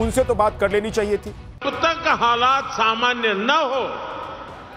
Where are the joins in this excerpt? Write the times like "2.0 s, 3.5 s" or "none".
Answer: 1.6 s